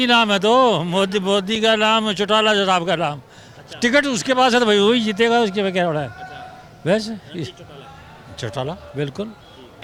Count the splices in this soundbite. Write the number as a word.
zero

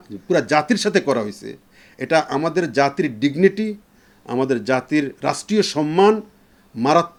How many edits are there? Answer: zero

